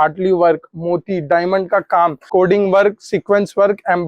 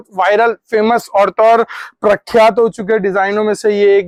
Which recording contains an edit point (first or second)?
first